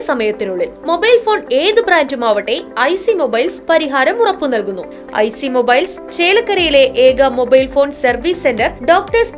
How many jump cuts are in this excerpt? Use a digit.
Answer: 1